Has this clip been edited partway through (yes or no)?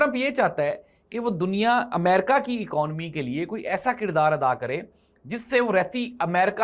no